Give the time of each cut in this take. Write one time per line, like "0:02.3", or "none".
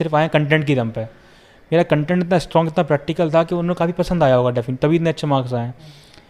none